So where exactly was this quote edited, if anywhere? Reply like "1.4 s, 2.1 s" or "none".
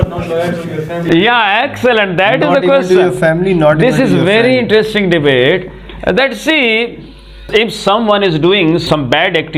7.4 s, 8.8 s